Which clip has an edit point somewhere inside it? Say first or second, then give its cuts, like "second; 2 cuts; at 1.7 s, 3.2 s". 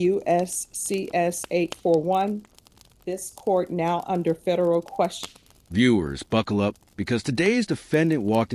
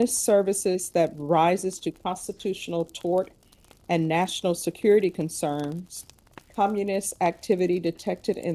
first; 1 cut; at 5.3 s